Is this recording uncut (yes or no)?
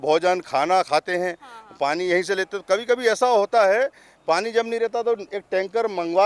yes